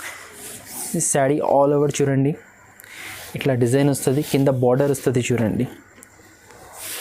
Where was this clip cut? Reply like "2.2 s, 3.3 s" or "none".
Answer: none